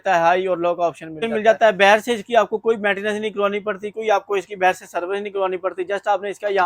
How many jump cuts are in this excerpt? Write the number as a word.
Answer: one